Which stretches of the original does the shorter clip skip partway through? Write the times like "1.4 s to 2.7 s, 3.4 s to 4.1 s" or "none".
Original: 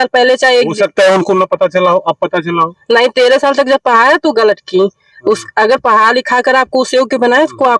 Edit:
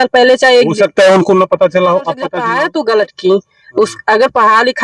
2.4 s to 3.8 s